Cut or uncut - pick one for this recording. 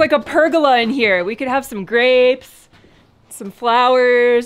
uncut